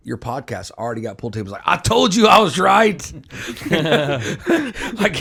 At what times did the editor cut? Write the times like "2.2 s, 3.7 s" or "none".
none